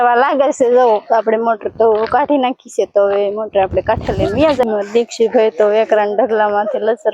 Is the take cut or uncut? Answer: cut